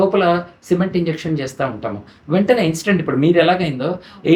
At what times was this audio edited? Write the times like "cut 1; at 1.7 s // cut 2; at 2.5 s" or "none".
none